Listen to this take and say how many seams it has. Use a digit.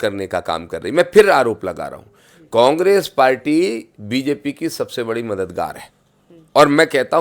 0